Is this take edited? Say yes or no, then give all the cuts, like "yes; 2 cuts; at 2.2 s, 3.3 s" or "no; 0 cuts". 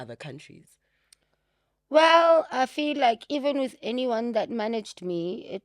no; 0 cuts